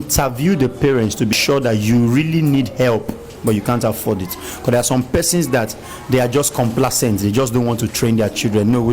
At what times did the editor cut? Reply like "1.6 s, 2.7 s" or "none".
1.3 s